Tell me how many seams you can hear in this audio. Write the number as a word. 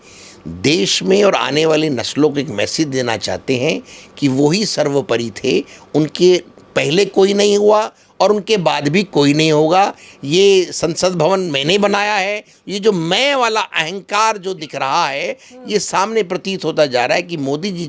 zero